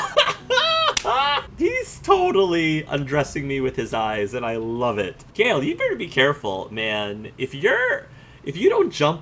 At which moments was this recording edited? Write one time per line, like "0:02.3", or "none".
0:01.4
0:05.3